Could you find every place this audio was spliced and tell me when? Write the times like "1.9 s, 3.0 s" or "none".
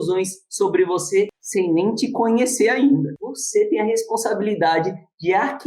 3.1 s